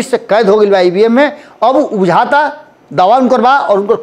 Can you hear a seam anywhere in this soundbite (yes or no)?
no